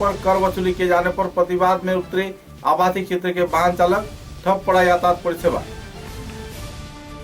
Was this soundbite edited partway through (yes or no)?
no